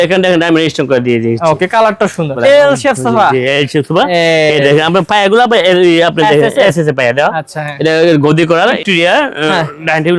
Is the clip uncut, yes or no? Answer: no